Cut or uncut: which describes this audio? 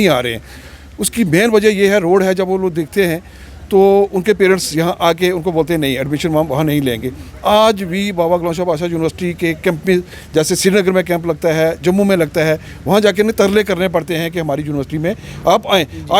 uncut